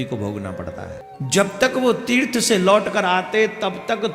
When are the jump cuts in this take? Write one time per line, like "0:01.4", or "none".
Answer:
0:01.0